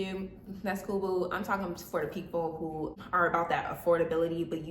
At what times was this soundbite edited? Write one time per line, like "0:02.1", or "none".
0:03.0

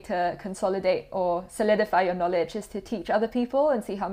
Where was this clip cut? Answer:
none

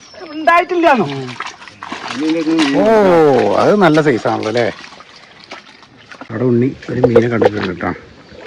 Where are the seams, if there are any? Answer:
0:06.3

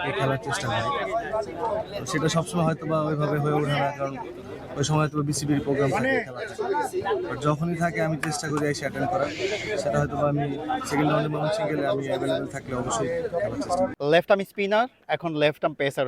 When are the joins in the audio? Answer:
0:13.9

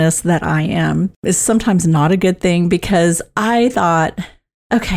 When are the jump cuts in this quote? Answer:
0:01.2

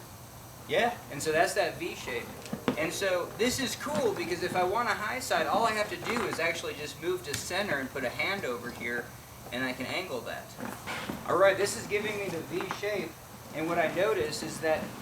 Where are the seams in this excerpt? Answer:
none

